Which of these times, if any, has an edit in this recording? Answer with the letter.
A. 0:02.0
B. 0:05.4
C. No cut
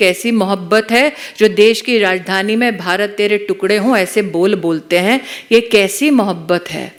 C